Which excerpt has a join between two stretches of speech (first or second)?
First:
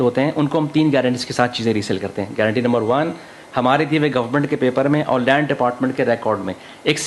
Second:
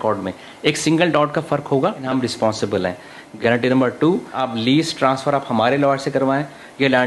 second